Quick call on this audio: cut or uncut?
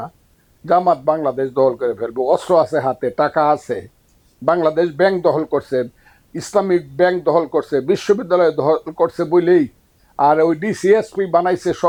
uncut